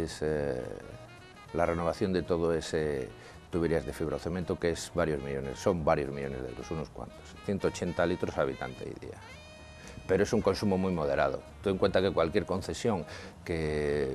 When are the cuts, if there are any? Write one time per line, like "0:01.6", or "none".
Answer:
0:07.4